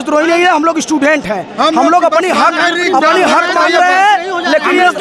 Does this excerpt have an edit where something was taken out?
no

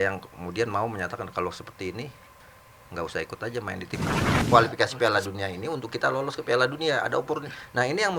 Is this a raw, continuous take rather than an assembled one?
no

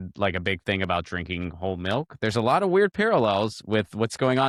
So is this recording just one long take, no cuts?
yes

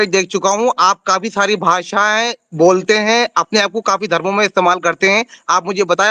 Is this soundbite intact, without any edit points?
yes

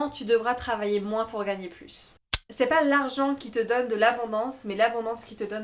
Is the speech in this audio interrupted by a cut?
yes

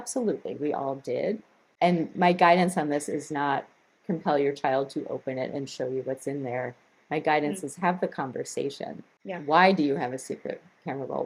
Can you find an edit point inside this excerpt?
no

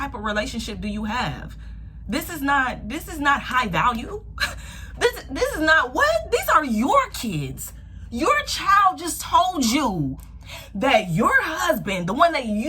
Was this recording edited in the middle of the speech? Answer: no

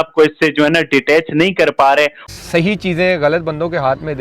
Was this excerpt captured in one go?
no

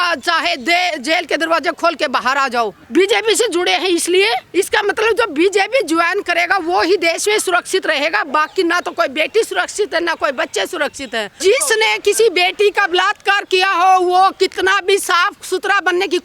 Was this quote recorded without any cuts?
no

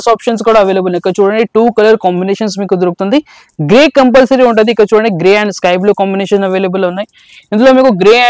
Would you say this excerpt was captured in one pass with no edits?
yes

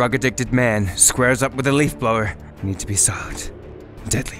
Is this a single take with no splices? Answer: yes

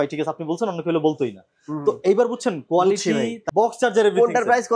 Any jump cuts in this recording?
yes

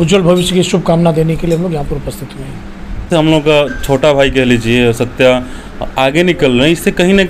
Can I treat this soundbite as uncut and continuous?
no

